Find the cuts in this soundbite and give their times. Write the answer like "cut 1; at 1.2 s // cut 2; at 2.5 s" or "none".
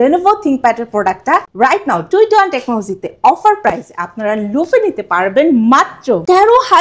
none